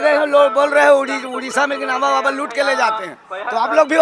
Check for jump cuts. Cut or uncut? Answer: uncut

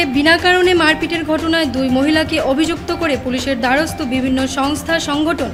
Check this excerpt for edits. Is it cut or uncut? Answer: uncut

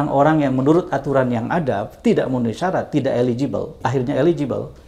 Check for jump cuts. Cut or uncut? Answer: cut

